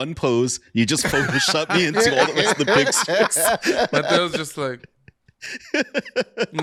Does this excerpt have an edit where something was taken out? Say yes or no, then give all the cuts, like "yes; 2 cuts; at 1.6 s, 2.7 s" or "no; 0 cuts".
no; 0 cuts